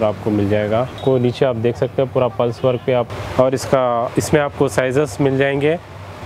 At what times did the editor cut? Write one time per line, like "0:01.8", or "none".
0:00.9
0:03.1